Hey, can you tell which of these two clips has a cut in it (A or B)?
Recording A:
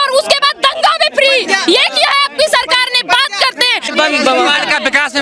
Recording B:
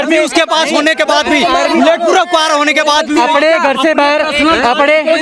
A